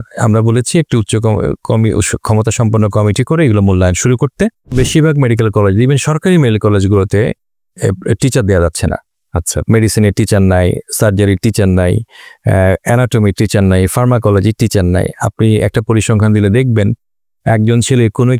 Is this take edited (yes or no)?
yes